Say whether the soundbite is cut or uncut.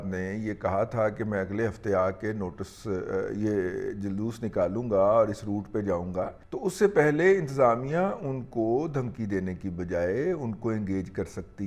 cut